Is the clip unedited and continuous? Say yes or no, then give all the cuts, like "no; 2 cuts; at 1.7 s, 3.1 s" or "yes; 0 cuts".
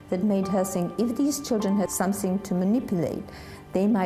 no; 1 cut; at 1.9 s